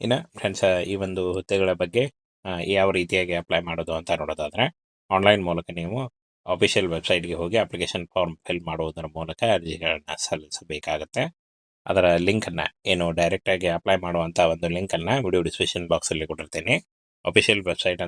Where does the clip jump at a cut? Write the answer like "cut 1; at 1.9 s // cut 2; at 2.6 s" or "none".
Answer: none